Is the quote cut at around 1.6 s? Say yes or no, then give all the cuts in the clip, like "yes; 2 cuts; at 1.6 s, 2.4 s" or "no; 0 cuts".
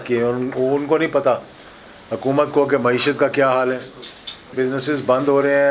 no; 1 cut; at 4.5 s